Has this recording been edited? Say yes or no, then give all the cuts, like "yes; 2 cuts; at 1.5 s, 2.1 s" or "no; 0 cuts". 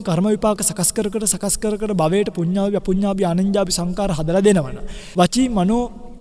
no; 0 cuts